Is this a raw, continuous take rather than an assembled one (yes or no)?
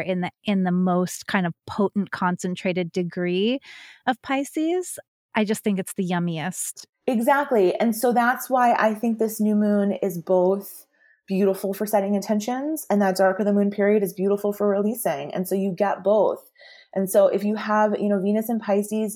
yes